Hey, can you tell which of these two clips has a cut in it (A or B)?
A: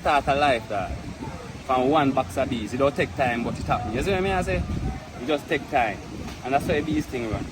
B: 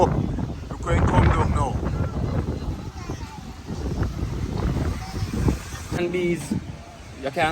B